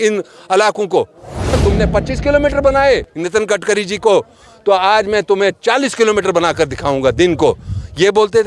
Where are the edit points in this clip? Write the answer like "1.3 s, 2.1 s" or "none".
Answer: 1.6 s